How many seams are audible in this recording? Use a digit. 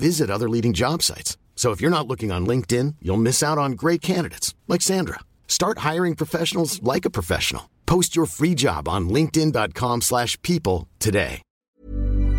1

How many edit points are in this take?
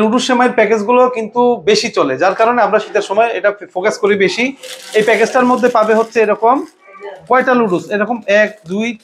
0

